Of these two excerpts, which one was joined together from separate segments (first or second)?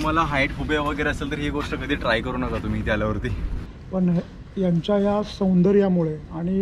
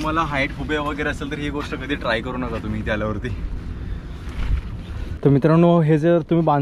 first